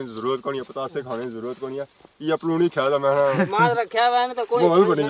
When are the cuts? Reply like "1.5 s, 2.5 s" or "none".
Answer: none